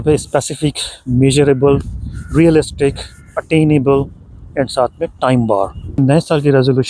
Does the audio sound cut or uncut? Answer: cut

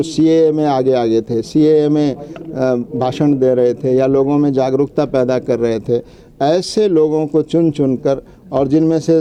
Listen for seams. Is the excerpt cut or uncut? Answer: uncut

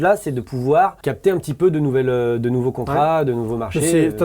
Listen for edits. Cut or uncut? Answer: cut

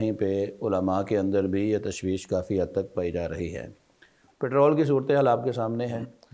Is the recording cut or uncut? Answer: cut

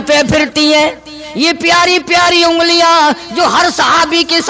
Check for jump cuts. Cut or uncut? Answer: uncut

